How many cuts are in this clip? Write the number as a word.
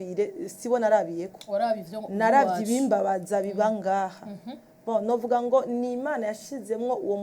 zero